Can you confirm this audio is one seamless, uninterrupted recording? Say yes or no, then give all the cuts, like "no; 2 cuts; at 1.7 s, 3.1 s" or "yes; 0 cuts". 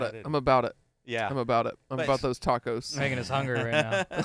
yes; 0 cuts